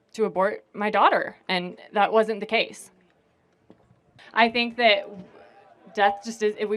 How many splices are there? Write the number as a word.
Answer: one